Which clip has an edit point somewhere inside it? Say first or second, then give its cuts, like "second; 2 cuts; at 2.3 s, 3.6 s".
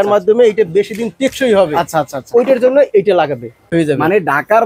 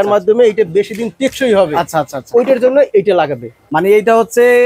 first; 1 cut; at 3.6 s